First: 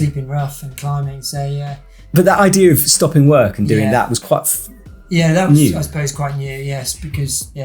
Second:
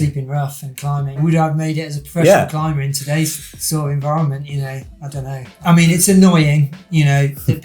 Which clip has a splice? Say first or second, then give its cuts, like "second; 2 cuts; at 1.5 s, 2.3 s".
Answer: second; 2 cuts; at 1.2 s, 5.5 s